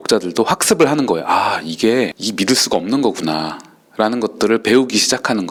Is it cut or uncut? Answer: uncut